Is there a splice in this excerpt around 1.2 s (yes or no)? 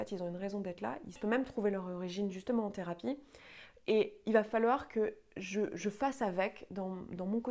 yes